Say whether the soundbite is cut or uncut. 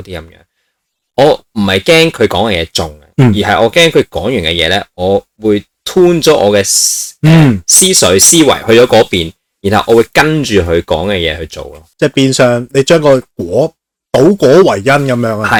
uncut